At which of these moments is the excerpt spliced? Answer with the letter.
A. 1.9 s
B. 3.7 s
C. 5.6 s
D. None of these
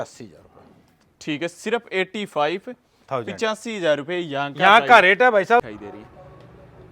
C